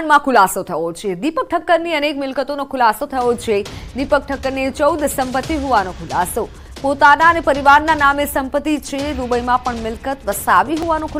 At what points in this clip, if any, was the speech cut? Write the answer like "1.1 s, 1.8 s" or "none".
none